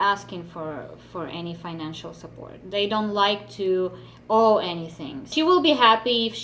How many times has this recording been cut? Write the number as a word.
one